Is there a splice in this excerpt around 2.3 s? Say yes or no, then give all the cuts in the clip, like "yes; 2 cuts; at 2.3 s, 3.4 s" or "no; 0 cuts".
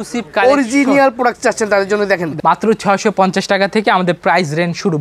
yes; 1 cut; at 2.3 s